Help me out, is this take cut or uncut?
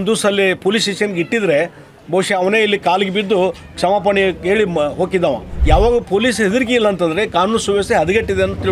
cut